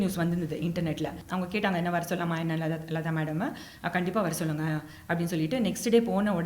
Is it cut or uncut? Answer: cut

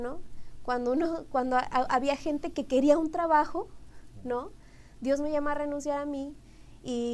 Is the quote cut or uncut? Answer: uncut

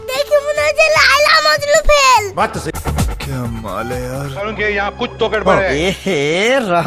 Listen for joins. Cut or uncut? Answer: cut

